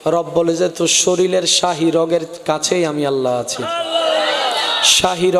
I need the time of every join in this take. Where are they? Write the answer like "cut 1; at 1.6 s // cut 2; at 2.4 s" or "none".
none